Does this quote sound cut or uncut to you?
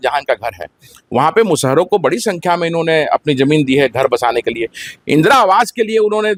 uncut